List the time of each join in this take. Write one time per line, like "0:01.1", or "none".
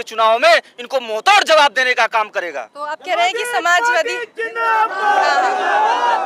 none

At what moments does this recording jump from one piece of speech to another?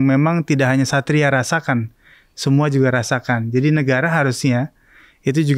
none

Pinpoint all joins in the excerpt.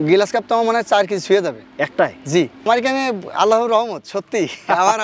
0:02.7

